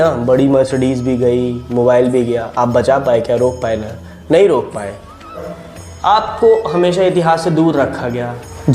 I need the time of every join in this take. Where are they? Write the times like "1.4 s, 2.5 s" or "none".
5.4 s